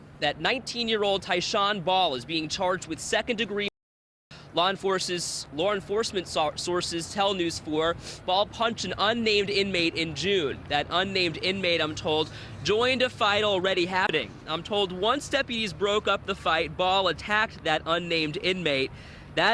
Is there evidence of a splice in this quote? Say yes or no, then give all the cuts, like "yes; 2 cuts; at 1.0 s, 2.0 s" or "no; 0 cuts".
no; 0 cuts